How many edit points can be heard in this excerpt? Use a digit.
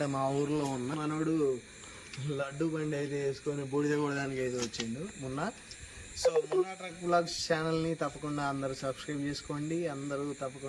1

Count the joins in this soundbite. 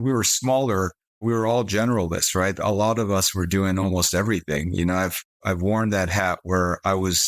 1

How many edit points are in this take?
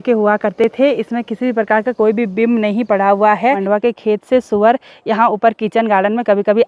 1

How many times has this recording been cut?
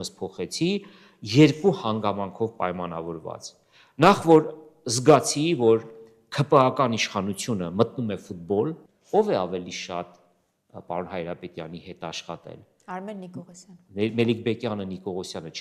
1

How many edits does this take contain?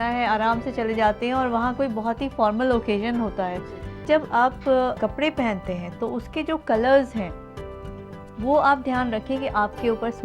2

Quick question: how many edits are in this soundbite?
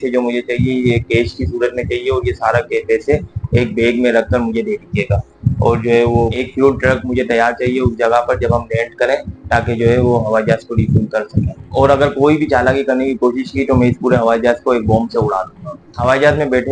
0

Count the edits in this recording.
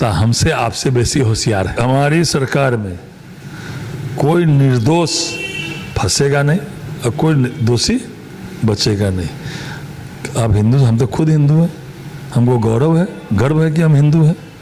1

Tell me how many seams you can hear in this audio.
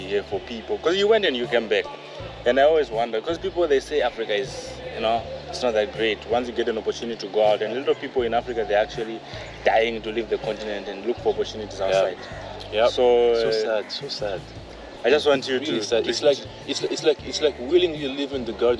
0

